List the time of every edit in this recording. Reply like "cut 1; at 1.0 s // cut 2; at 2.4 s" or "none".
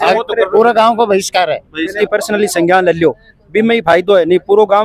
cut 1; at 1.9 s